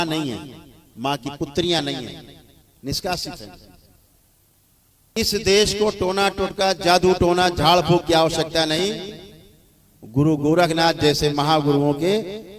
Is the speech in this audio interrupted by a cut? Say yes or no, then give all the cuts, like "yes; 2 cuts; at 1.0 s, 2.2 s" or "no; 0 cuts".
yes; 1 cut; at 5.2 s